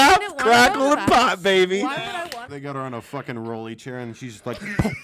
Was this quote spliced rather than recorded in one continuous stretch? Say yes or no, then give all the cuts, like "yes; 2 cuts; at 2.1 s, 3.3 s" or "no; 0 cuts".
yes; 1 cut; at 2.5 s